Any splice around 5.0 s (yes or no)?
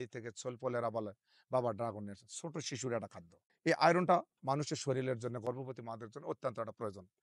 no